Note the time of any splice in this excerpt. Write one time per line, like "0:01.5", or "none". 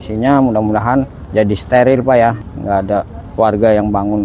0:01.2
0:02.4